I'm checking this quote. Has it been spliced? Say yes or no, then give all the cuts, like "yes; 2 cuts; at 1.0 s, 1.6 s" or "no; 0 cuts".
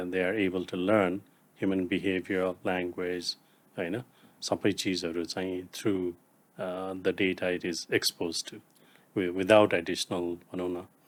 no; 0 cuts